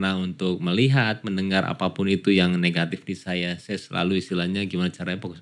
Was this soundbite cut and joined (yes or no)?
no